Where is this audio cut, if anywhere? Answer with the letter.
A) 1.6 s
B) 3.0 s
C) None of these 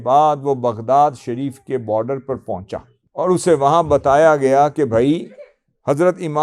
B